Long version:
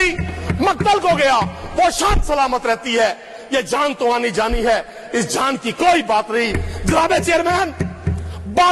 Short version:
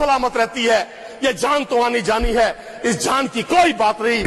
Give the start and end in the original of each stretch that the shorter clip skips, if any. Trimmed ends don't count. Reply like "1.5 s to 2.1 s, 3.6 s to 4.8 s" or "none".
none